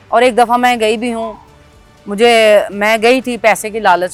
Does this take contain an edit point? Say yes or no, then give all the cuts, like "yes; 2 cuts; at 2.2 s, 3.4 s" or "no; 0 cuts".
no; 0 cuts